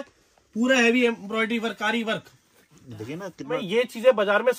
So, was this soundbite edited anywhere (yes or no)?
yes